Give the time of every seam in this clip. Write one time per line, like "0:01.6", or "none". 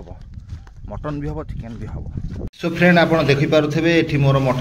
0:02.5